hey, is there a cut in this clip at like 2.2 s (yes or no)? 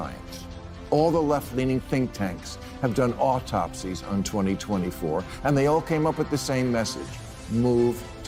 no